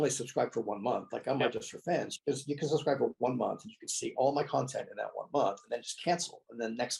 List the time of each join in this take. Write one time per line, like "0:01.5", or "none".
none